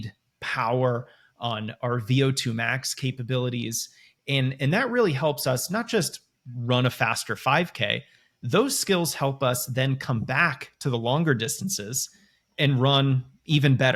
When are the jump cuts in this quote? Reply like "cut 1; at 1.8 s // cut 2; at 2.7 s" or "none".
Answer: none

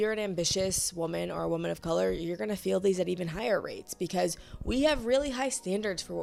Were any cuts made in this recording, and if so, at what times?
none

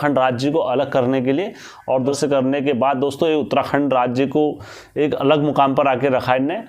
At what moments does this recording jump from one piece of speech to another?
cut 1; at 2.2 s

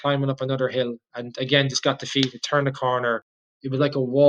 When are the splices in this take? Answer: none

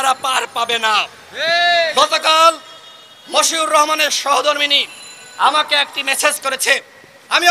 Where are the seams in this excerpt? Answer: cut 1; at 1.9 s

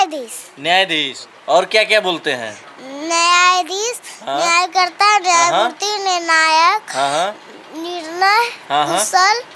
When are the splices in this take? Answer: none

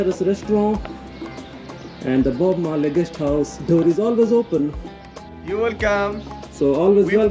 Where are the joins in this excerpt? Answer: cut 1; at 5.4 s

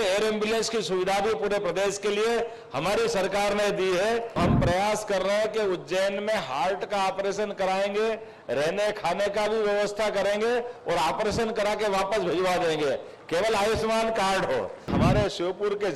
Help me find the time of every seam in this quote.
cut 1; at 4.4 s // cut 2; at 14.9 s

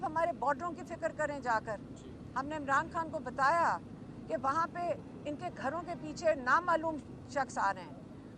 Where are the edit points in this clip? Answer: none

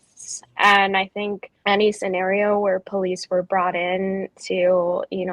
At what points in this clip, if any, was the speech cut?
cut 1; at 1.5 s

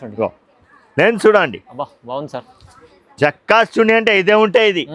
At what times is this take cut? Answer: none

